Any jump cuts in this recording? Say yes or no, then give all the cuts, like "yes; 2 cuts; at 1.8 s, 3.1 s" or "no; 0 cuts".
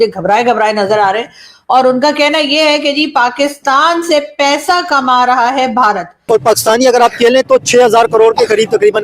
yes; 1 cut; at 6.2 s